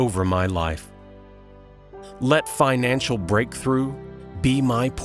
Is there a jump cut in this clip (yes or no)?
no